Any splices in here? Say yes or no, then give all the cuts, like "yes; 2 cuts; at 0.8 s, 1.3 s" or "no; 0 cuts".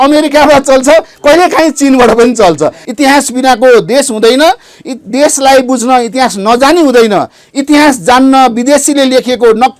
yes; 1 cut; at 2.8 s